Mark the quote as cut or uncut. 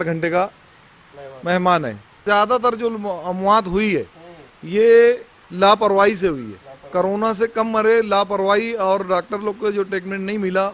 cut